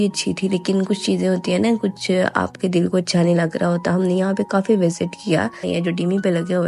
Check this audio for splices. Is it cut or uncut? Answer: uncut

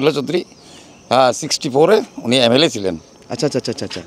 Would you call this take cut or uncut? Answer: uncut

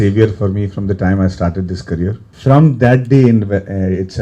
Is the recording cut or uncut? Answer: cut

